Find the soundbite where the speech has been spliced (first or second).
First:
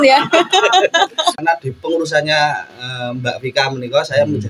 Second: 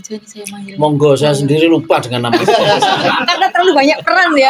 first